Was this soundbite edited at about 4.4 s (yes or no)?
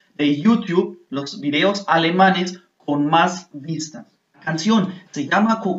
yes